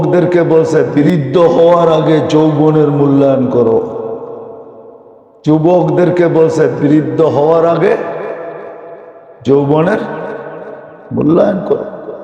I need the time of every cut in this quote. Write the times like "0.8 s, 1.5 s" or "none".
1.0 s

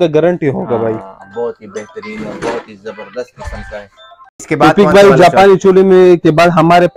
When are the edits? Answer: none

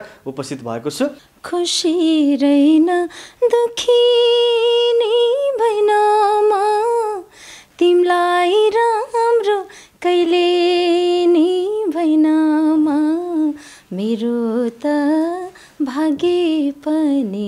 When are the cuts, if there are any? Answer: 1.3 s

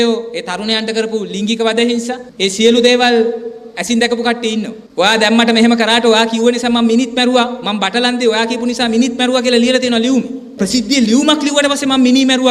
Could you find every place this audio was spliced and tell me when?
4.8 s, 10.5 s

